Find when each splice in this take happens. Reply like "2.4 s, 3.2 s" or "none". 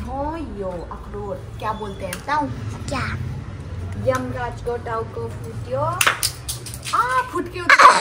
none